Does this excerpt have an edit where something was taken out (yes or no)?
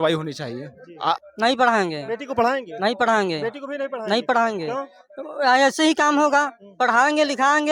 yes